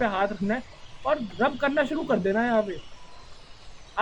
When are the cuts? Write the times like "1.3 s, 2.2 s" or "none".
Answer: none